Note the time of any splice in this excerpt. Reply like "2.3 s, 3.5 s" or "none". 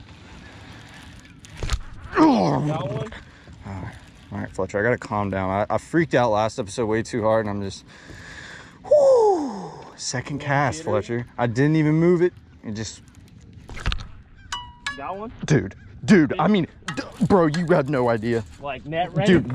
none